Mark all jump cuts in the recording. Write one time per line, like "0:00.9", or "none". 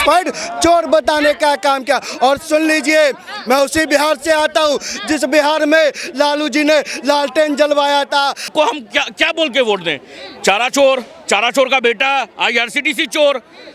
0:08.5